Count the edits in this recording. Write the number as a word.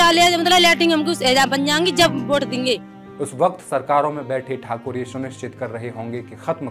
one